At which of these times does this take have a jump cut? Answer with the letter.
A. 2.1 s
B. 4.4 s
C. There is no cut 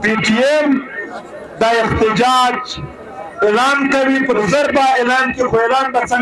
B